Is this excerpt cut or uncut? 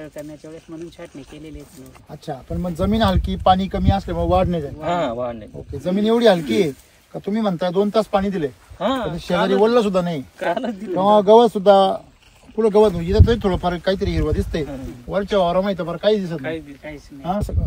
uncut